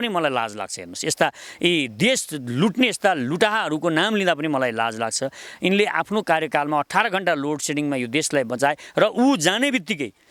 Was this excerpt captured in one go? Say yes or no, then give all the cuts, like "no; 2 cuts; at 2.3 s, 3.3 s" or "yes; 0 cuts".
yes; 0 cuts